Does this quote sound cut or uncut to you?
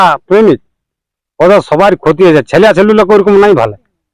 uncut